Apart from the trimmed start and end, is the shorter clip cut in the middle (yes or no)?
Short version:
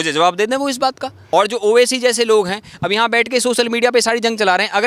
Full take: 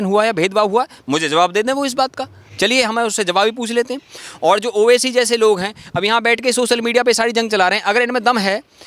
yes